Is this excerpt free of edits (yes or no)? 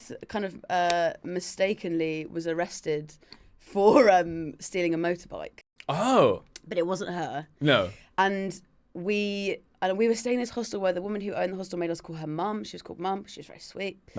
yes